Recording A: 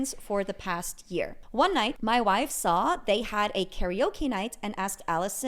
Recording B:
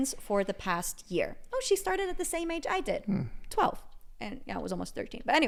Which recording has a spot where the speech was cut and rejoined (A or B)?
A